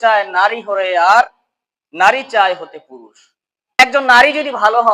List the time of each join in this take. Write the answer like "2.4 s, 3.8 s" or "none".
3.8 s